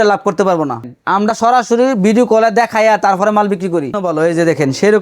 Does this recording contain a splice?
yes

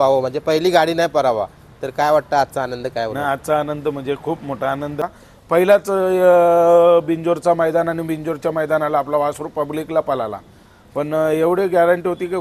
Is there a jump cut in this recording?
yes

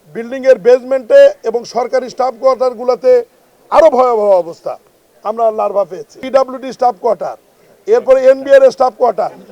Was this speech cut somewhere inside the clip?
yes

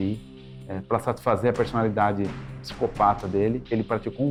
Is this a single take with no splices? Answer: yes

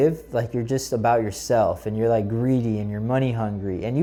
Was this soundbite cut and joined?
no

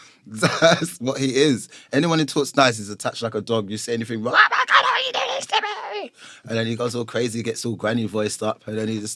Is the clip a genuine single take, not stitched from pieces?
yes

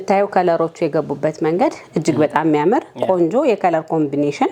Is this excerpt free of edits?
yes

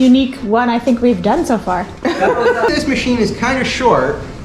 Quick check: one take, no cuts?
no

